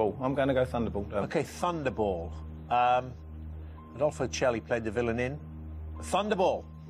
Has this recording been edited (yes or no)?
no